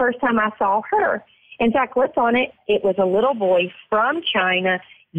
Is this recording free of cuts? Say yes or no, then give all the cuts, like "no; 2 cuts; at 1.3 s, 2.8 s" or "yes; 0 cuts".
no; 1 cut; at 2.6 s